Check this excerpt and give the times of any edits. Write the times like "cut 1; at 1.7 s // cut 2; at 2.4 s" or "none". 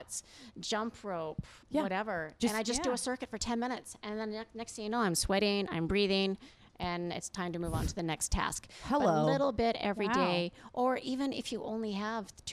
none